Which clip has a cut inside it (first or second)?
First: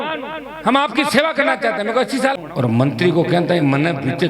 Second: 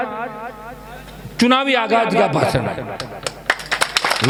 first